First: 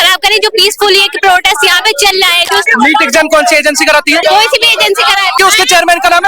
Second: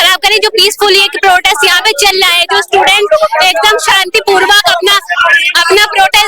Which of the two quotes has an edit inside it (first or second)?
first